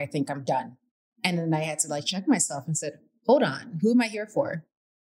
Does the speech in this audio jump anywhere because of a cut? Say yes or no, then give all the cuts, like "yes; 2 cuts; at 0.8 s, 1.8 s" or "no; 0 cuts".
no; 0 cuts